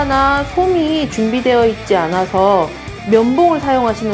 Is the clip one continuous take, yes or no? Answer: yes